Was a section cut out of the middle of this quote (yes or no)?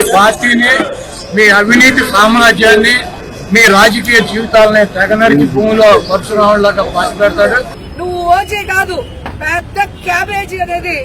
yes